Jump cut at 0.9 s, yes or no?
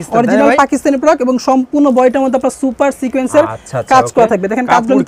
no